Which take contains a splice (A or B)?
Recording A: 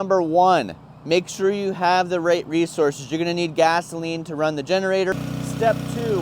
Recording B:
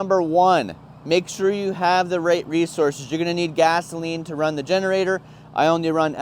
A